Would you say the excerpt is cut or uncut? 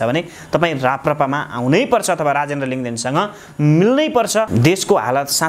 cut